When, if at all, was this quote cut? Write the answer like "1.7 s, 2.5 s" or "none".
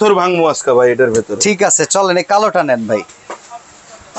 none

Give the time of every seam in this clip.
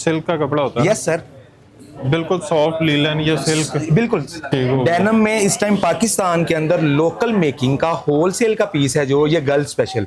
4.5 s

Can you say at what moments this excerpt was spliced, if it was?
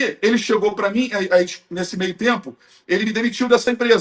none

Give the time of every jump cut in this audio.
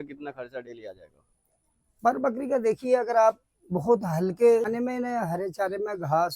4.7 s

